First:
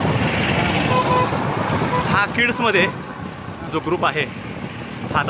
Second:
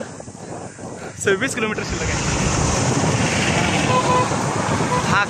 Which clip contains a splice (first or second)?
second